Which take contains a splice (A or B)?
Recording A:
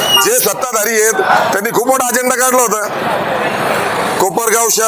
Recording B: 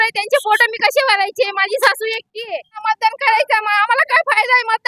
B